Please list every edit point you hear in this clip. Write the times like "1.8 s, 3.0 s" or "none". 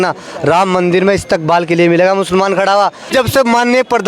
3.1 s